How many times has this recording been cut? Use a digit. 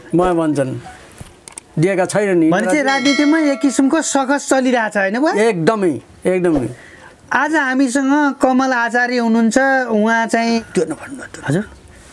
0